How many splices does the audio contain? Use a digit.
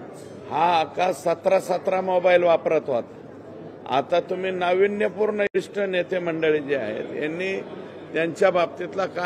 1